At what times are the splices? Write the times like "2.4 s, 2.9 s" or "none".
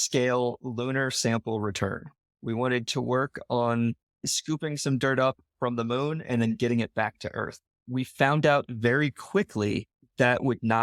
none